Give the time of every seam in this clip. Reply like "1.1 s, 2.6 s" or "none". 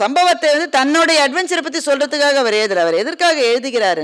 none